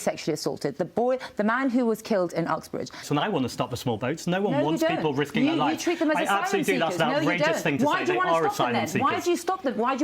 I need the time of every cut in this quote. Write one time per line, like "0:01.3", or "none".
0:03.0